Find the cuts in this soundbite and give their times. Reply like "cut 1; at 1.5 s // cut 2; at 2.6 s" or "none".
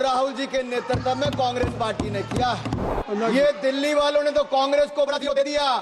cut 1; at 2.9 s

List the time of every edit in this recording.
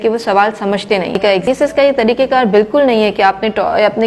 cut 1; at 1.5 s

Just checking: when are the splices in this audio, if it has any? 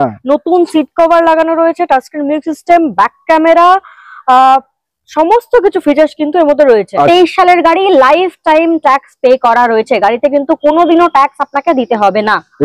cut 1; at 7.1 s

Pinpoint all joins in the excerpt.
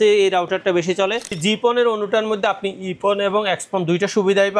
cut 1; at 1.3 s

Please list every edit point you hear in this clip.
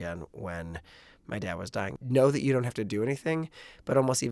cut 1; at 2.0 s

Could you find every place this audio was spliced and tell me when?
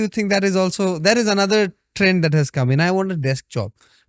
none

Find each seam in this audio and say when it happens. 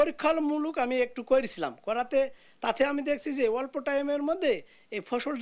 none

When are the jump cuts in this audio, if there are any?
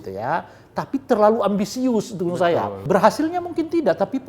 cut 1; at 2.8 s

